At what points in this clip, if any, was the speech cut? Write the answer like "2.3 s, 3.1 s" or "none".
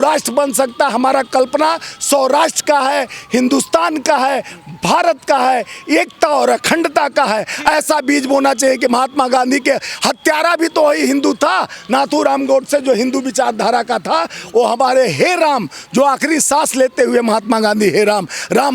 none